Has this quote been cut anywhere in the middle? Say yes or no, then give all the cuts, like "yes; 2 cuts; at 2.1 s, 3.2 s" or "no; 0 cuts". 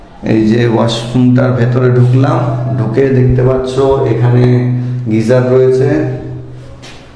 no; 0 cuts